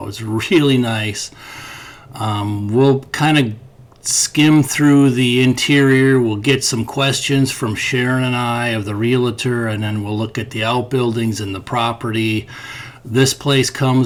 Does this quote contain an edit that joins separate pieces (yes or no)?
no